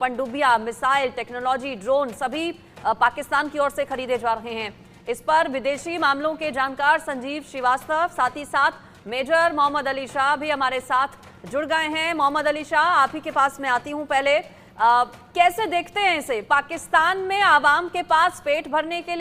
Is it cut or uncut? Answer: uncut